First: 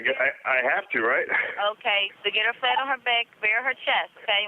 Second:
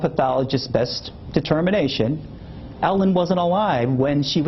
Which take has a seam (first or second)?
first